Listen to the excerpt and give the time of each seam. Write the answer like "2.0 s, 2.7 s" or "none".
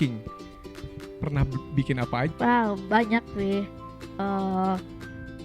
2.3 s